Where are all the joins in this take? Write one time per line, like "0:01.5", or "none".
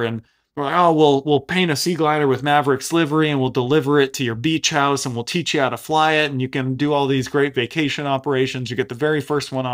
none